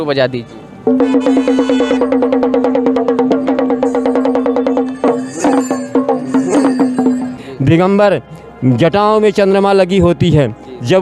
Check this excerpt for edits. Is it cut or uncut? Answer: cut